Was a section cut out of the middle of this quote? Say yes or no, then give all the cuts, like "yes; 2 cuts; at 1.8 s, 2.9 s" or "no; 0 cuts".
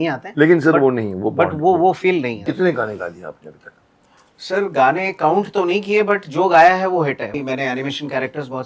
yes; 2 cuts; at 2.4 s, 7.3 s